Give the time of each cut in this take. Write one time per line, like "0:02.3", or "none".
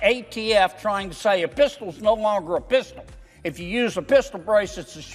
none